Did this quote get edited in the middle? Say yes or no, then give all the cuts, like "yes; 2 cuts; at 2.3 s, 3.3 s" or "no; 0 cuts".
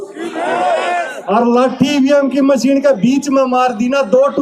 no; 0 cuts